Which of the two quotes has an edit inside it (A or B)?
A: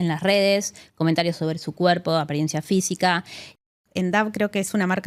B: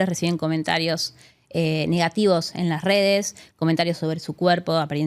A